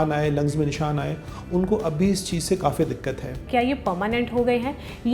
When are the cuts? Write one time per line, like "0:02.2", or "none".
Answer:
0:03.4